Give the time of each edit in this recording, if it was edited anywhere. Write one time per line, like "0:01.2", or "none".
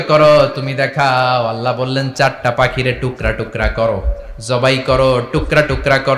none